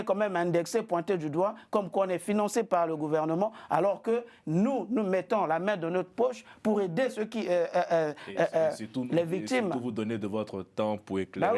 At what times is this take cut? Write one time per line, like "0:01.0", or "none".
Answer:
none